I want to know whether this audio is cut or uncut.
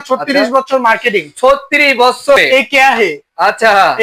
cut